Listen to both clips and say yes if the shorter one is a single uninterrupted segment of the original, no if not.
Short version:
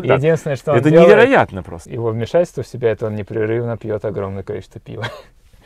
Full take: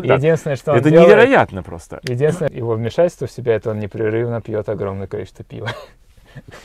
no